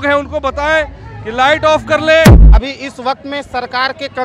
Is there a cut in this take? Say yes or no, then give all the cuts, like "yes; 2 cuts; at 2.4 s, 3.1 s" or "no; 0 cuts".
yes; 1 cut; at 2.4 s